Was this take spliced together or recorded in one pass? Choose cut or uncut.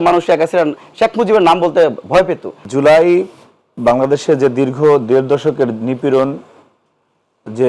cut